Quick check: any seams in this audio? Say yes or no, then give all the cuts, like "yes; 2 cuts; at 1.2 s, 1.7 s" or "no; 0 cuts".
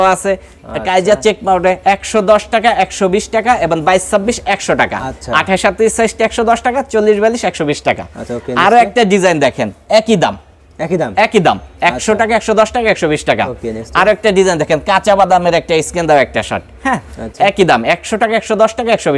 no; 0 cuts